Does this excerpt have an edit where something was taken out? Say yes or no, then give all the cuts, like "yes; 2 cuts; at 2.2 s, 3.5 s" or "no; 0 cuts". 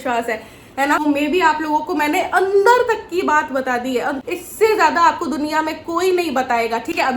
yes; 2 cuts; at 1.0 s, 4.2 s